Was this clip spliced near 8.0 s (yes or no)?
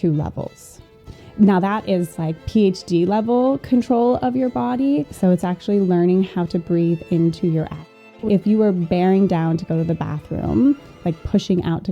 yes